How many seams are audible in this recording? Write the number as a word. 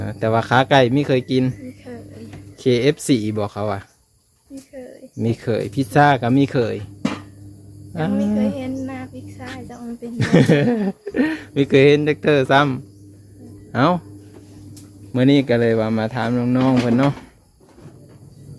zero